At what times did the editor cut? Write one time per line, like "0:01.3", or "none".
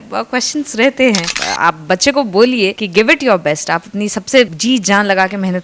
0:01.4
0:02.8
0:04.6